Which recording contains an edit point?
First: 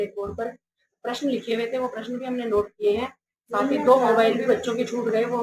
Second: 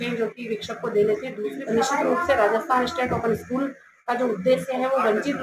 second; 1 cut; at 1.5 s

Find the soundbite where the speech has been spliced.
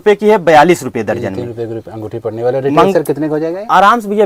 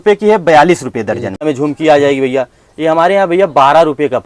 second; 1 cut; at 1.5 s

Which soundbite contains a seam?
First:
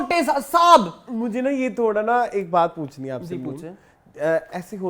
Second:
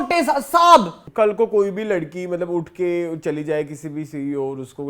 second; 1 cut; at 1.0 s

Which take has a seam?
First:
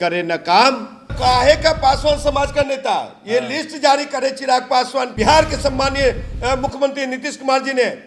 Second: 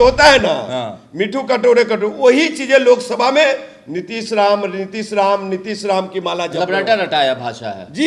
first; 2 cuts; at 1.1 s, 5.1 s

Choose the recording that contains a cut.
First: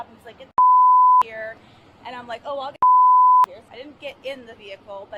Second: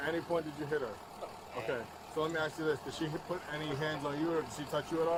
first; 1 cut; at 3.6 s

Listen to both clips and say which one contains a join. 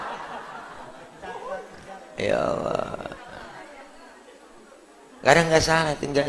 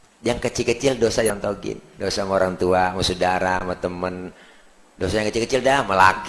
second; 1 cut; at 1.3 s

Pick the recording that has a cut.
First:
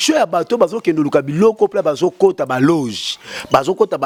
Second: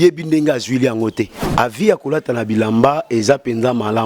second; 1 cut; at 1.4 s

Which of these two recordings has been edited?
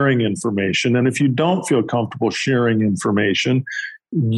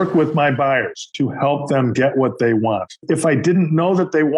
second; 2 cuts; at 1.0 s, 2.9 s

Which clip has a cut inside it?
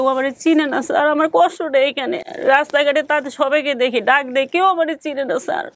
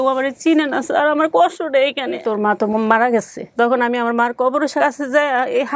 second; 2 cuts; at 2.2 s, 4.7 s

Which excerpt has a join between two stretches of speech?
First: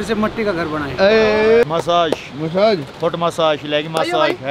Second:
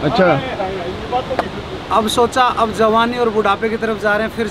first; 1 cut; at 1.6 s

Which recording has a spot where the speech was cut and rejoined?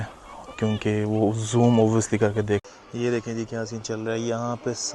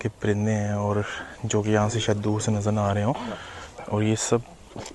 first; 1 cut; at 2.6 s

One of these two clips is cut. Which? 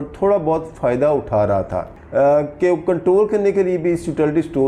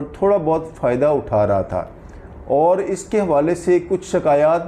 first; 1 cut; at 2.0 s

